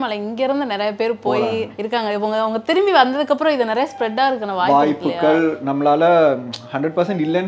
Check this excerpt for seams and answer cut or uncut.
uncut